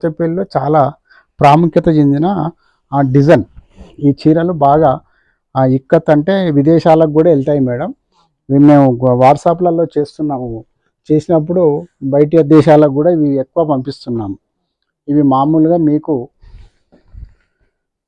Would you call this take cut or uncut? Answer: uncut